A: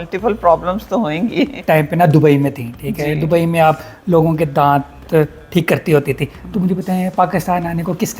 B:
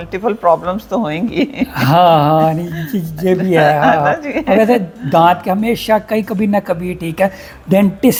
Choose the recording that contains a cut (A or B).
A